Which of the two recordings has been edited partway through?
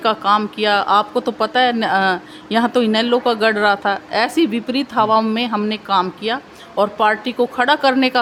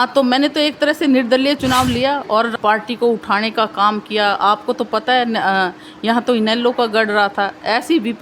second; 1 cut; at 2.5 s

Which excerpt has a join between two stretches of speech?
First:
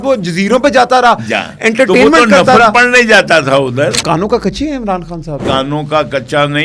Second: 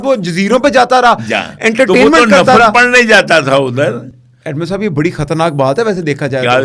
first; 2 cuts; at 4.0 s, 5.4 s

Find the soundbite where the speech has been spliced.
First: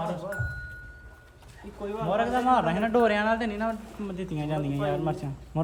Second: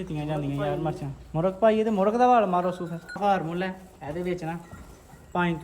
second; 1 cut; at 3.2 s

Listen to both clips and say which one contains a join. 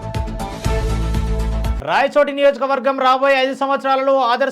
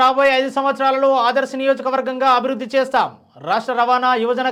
first; 1 cut; at 1.7 s

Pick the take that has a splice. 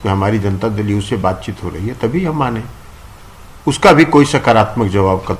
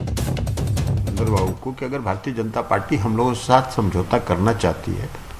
second; 1 cut; at 1.1 s

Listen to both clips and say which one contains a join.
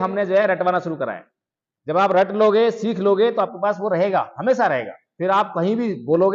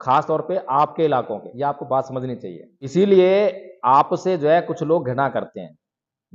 second; 2 cuts; at 1.5 s, 2.9 s

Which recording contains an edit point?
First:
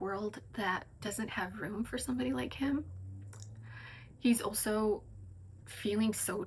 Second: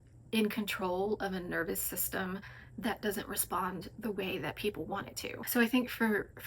second; 1 cut; at 5.4 s

